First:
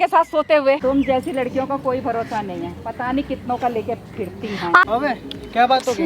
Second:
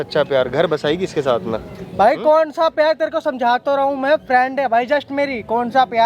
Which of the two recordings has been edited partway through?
first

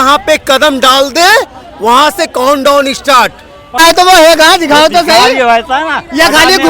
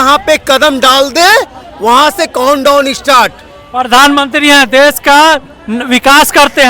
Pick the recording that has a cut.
first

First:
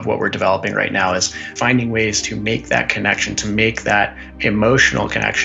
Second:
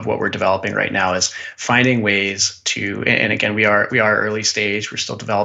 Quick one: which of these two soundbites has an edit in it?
first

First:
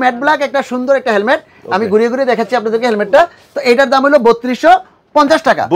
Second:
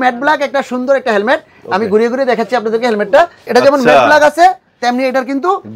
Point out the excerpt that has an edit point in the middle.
second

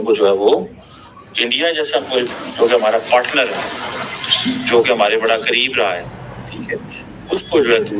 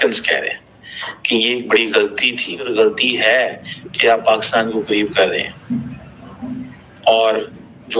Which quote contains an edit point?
second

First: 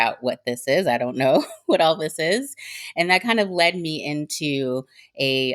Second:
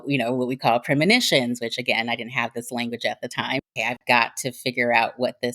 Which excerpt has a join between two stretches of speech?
second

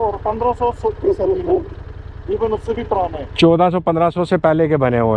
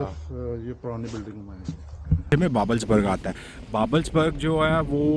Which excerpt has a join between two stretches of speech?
second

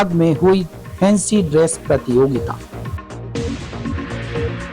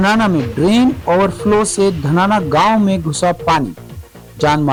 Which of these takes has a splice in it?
first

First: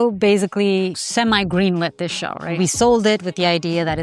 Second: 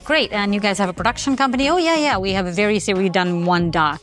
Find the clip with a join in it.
first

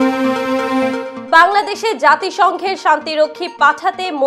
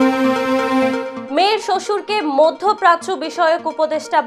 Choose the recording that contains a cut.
second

